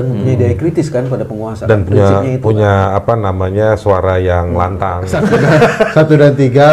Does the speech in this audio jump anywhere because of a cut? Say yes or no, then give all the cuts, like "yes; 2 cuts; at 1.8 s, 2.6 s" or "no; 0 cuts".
yes; 1 cut; at 5.3 s